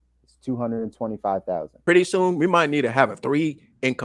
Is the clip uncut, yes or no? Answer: no